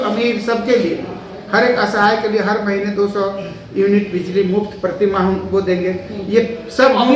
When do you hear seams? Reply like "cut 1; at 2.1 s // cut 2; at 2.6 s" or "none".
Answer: none